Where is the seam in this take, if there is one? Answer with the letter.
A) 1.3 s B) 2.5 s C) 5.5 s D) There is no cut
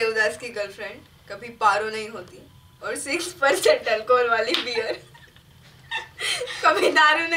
D